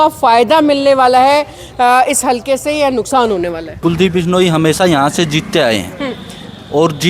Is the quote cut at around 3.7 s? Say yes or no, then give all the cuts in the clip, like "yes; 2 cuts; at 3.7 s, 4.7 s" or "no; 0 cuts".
yes; 1 cut; at 3.7 s